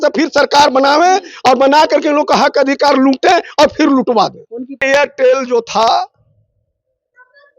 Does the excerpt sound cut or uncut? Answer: cut